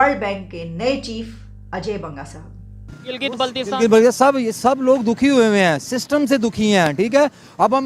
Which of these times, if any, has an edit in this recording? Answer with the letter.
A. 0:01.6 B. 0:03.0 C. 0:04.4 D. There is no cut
B